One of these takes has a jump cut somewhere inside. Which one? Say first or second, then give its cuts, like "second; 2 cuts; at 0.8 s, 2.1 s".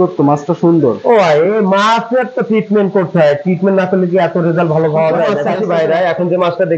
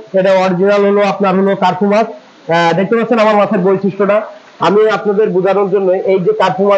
first; 1 cut; at 5.5 s